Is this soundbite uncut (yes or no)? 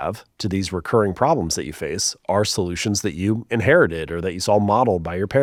yes